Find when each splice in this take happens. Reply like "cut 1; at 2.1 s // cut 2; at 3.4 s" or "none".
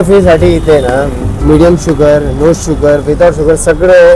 none